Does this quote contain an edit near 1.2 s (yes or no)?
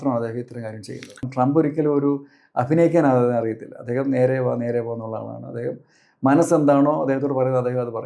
yes